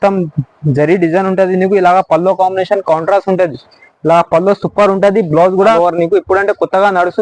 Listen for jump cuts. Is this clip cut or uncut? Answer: cut